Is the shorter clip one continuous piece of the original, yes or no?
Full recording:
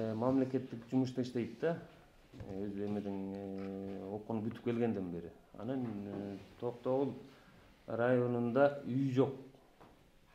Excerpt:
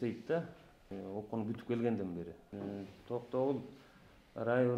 no